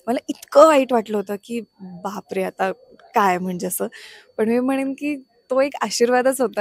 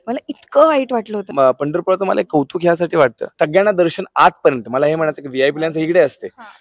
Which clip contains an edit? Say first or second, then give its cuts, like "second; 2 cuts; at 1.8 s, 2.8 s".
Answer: second; 2 cuts; at 1.3 s, 3.3 s